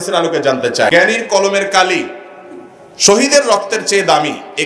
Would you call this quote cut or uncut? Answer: cut